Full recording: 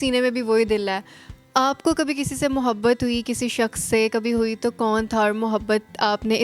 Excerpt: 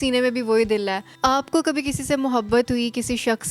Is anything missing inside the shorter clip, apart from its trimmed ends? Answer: yes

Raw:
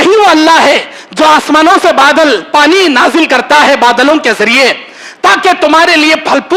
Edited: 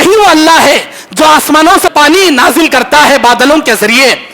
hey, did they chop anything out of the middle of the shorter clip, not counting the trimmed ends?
yes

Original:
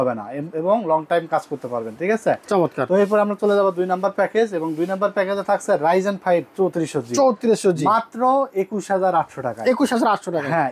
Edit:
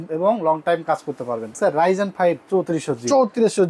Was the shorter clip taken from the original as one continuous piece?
no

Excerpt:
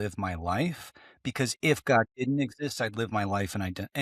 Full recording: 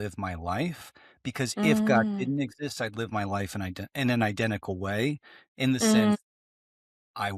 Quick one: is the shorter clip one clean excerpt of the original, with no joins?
yes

